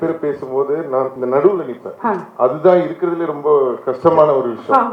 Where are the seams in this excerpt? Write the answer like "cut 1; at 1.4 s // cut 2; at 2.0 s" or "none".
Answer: cut 1; at 1.2 s